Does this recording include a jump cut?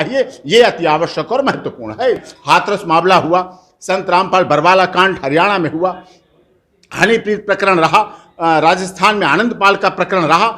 yes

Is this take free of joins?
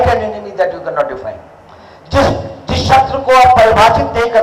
yes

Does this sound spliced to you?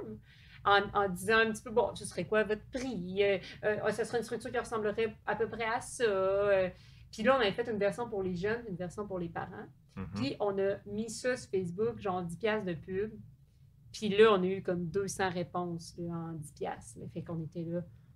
no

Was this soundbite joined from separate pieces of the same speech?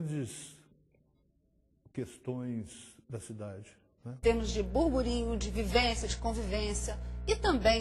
yes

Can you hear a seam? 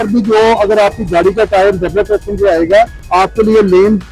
yes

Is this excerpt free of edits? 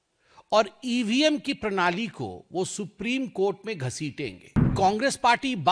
no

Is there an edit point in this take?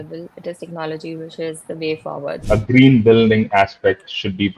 yes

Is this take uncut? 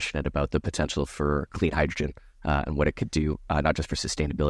yes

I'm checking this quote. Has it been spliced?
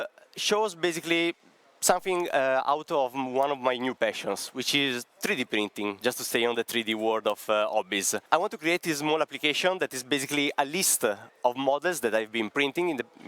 yes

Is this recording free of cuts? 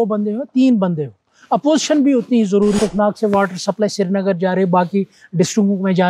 no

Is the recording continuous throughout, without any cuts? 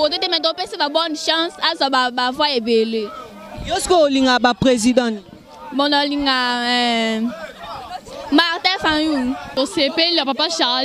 no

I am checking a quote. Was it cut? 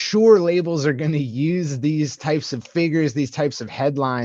no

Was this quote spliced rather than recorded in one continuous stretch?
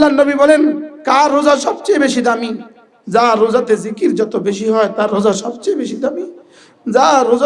yes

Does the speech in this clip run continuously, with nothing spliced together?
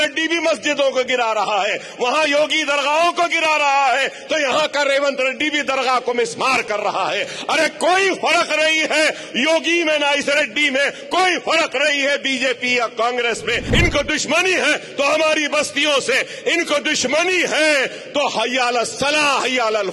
no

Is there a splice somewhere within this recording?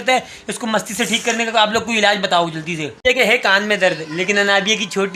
no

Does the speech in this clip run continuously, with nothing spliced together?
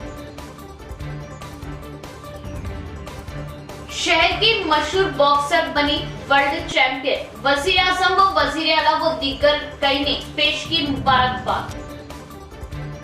no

